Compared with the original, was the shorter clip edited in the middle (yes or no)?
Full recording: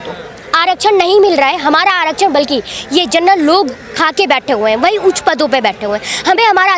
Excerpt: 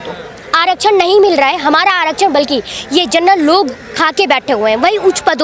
no